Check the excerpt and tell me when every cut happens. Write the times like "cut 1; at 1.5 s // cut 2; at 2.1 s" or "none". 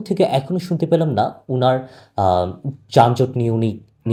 none